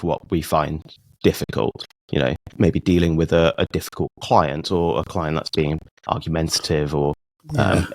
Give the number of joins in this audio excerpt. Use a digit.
1